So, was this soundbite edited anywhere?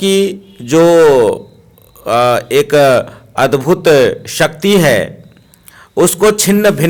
no; 0 cuts

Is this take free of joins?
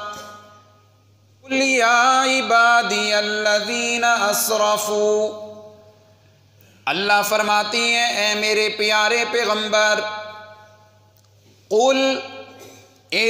no; 1 cut; at 1.5 s

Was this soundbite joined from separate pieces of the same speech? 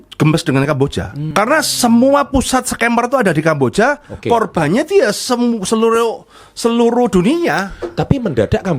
yes; 1 cut; at 1.2 s

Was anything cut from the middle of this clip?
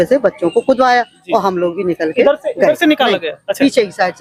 no; 0 cuts

